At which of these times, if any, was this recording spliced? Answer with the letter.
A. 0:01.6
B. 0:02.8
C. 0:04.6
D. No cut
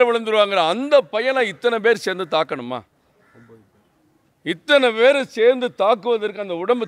D